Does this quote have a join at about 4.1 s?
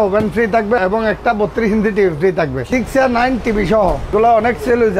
yes; 3 cuts; at 0.8 s, 2.6 s, 4.1 s

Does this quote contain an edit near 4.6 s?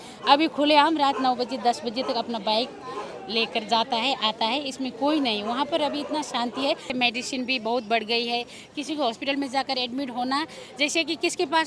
no; 1 cut; at 6.9 s

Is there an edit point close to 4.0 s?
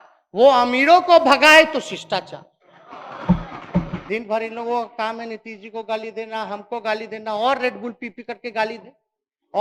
yes; 1 cut; at 4.0 s

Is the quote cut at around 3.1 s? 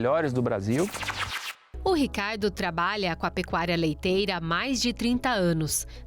no; 1 cut; at 1.3 s

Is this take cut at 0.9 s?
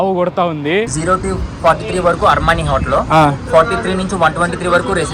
yes; 1 cut; at 0.9 s

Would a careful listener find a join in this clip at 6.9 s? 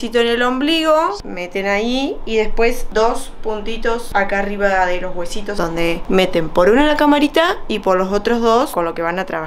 no; 5 cuts; at 1.2 s, 2.8 s, 4.0 s, 5.6 s, 8.7 s

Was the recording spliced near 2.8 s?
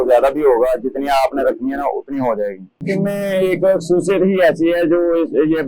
yes; 1 cut; at 2.8 s

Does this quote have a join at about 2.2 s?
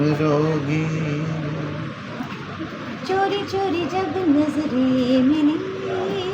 yes; 1 cut; at 2.2 s

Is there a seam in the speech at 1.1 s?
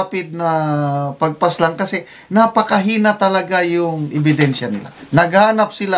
no; 1 cut; at 4.9 s

